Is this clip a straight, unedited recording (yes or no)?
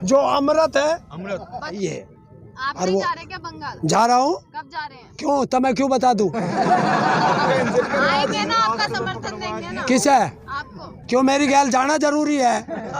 no